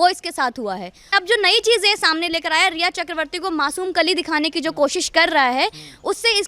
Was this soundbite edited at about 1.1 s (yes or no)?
yes